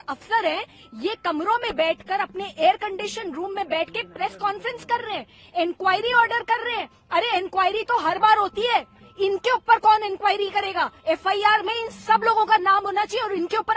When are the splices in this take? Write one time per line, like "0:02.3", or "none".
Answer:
none